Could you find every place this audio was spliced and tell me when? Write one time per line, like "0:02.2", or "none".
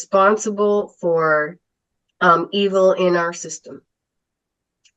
none

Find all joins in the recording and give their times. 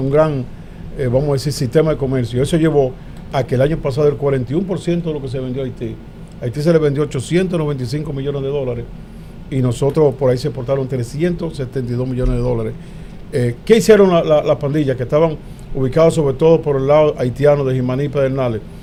none

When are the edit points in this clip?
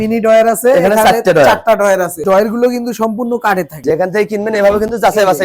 0:02.2
0:03.8

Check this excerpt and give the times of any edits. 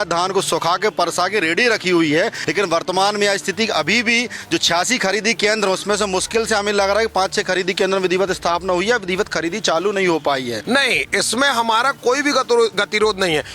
0:02.4
0:10.6

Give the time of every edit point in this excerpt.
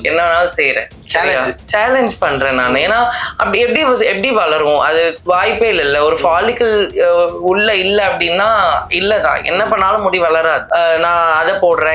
0:00.9
0:05.2
0:10.6

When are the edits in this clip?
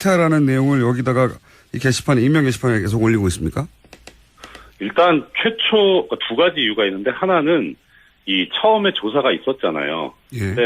0:06.4

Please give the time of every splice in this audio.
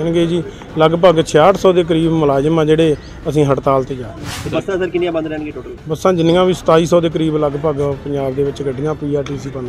none

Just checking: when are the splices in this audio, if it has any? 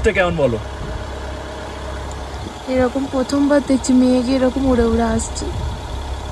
none

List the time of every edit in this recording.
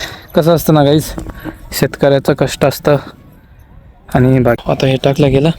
0:04.6

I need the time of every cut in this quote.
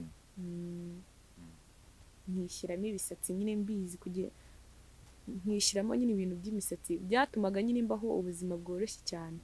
none

